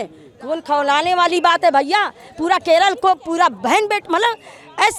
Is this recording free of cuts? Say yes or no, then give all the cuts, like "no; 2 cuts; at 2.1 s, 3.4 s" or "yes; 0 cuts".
yes; 0 cuts